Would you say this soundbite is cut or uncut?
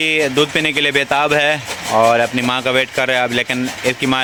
uncut